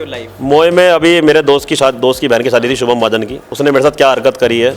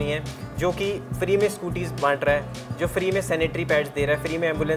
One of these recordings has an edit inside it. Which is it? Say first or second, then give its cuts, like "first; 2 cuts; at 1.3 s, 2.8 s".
first; 1 cut; at 3.4 s